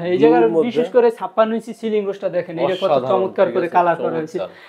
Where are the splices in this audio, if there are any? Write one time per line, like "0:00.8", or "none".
none